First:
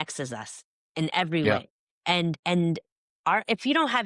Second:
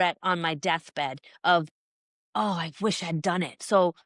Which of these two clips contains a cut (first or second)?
first